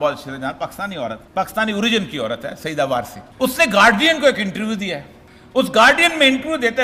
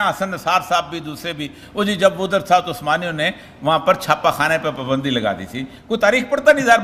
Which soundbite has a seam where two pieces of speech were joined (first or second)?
first